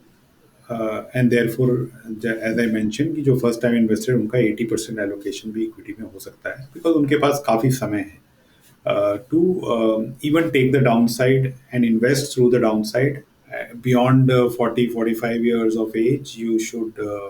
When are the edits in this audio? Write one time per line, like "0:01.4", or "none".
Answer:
0:13.3